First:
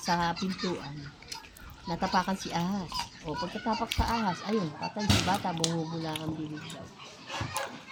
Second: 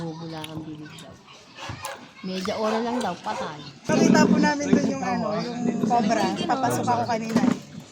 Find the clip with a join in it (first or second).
second